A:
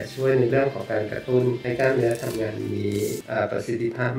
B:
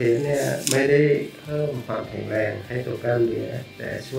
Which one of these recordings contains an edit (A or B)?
A